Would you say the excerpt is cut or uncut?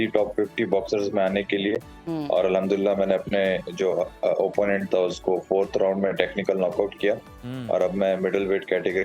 uncut